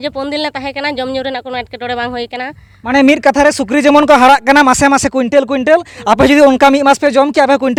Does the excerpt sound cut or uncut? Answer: uncut